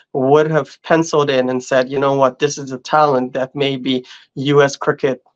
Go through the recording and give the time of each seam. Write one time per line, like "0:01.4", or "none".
none